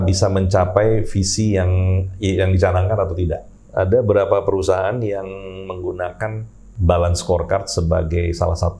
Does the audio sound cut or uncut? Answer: cut